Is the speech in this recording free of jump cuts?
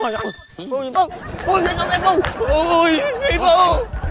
no; 1 cut; at 0.9 s

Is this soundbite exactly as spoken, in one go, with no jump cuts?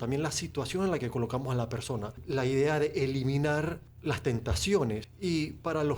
no; 3 cuts; at 2.2 s, 3.9 s, 5.1 s

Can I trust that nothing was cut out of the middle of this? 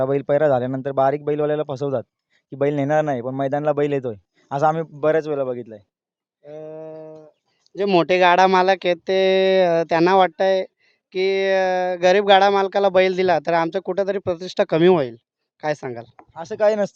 yes; 0 cuts

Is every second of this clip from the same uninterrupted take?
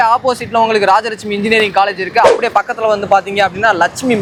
yes; 0 cuts

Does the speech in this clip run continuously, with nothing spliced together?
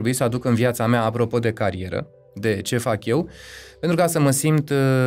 yes; 0 cuts

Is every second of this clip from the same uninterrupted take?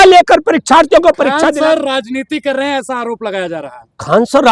no; 1 cut; at 1.4 s

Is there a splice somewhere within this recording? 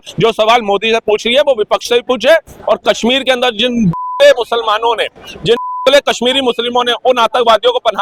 no; 0 cuts

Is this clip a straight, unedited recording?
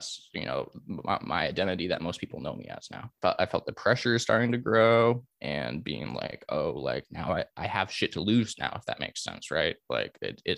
no; 1 cut; at 3.1 s

